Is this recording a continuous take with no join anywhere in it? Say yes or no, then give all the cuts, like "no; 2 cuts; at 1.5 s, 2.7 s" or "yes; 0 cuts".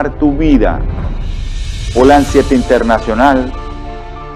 yes; 0 cuts